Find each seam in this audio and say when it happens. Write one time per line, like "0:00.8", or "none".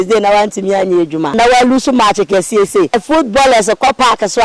0:01.3
0:03.0

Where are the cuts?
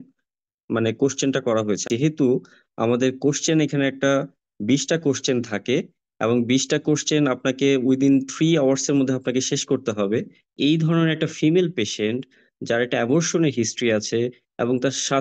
0:01.8
0:10.5

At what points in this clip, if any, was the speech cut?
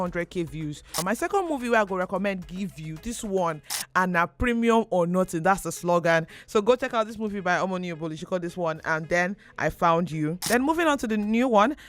0:01.0
0:03.7
0:10.5

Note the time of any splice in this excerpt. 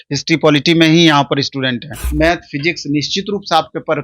0:02.0

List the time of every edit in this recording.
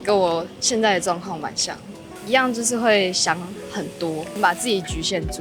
0:04.4

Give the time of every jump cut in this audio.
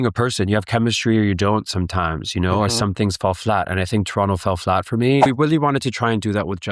0:05.2

